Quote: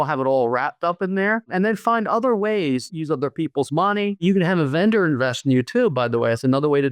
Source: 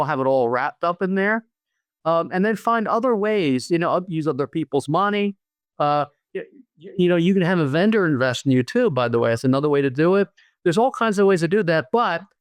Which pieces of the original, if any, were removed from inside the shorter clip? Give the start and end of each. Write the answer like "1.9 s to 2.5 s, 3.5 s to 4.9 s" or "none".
1.5 s to 2.3 s, 3.7 s to 4.0 s, 5.4 s to 7.2 s